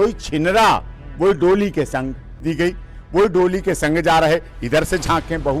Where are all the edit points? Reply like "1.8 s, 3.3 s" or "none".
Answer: 2.5 s

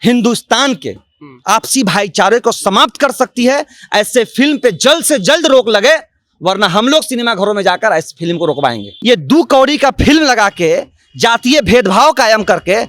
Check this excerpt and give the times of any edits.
8.9 s

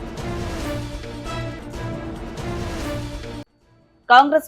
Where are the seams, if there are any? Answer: 1.0 s, 3.1 s

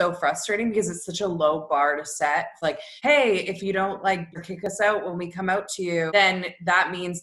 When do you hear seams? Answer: 2.7 s, 4.4 s, 6.1 s

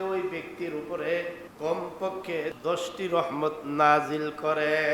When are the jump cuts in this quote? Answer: 1.4 s, 2.6 s

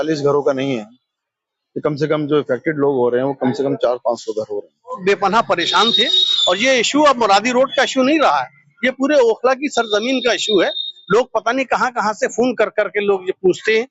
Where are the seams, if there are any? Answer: 5.0 s

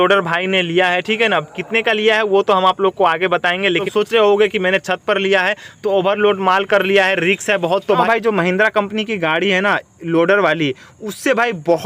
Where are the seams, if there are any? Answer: 3.8 s, 8.0 s

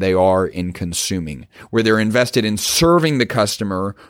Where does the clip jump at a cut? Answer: none

